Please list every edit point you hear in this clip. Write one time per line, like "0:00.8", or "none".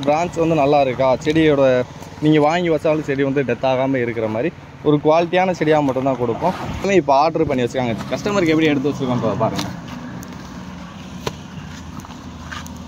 0:06.9

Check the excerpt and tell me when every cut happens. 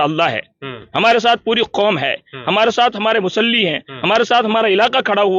none

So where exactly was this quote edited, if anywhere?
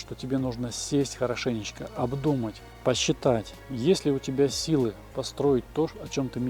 0:02.7
0:03.6

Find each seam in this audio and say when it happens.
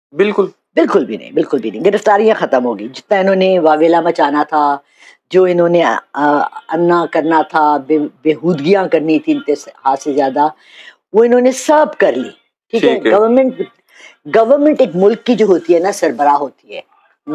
none

